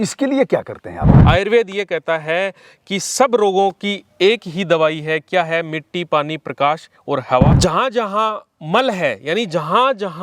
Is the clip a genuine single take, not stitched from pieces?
no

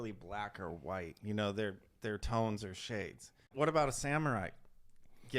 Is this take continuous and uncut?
no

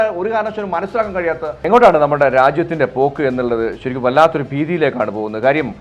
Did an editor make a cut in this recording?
yes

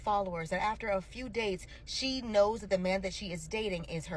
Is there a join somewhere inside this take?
no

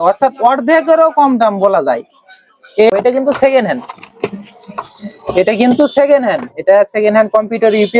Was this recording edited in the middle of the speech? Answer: yes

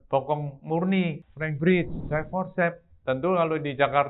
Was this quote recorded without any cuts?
no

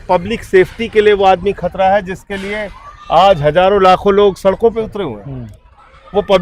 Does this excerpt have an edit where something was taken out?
no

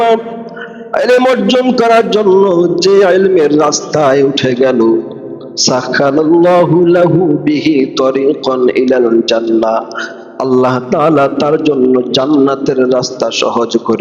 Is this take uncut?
yes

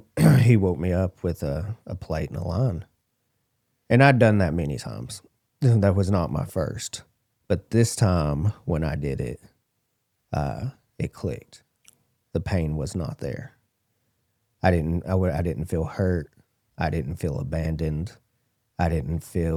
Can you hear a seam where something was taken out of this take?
no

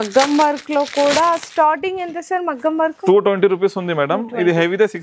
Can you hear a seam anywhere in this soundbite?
no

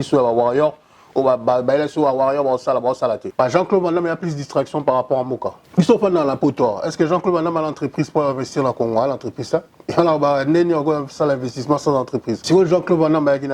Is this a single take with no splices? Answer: no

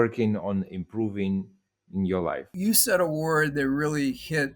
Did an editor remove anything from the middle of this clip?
yes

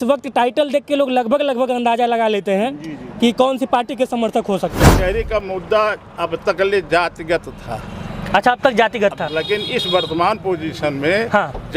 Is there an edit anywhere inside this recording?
yes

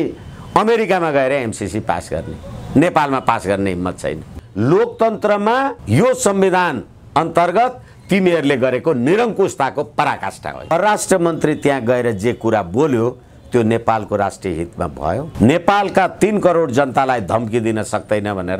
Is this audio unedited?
no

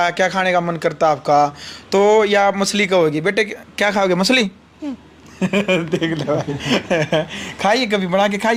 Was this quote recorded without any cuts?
yes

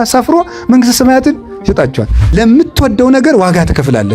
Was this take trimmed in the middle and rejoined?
yes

